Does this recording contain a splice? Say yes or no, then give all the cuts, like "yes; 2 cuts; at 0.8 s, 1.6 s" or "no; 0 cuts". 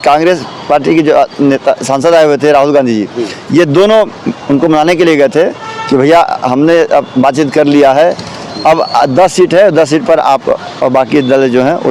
no; 0 cuts